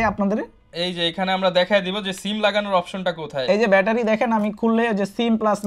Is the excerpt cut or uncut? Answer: uncut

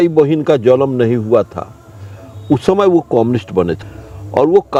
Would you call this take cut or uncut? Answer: uncut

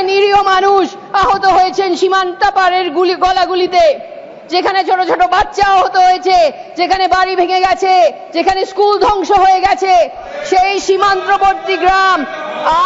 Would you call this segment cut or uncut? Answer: uncut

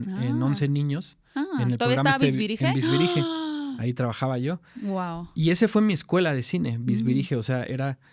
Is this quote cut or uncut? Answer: uncut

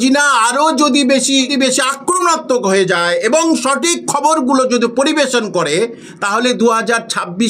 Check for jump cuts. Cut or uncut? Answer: cut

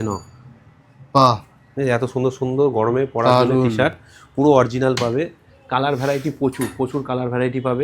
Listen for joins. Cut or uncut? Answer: uncut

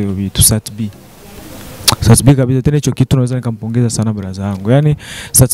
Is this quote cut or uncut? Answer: uncut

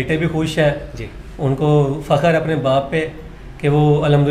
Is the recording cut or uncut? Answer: uncut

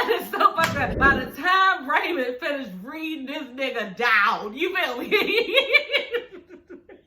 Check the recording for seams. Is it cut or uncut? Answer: cut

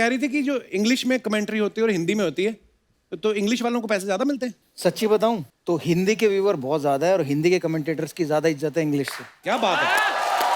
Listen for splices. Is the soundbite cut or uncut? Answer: cut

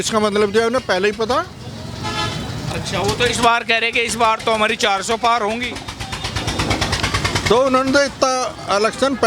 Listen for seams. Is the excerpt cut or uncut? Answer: uncut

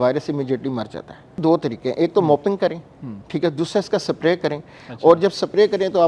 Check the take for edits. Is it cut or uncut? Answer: cut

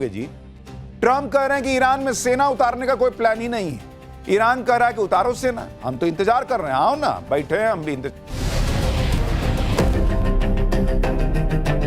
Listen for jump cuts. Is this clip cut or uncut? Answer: cut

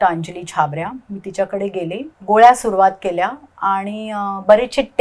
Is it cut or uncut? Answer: cut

